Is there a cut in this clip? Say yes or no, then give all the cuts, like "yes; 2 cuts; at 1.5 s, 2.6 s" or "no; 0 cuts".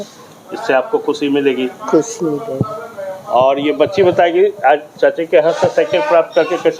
no; 0 cuts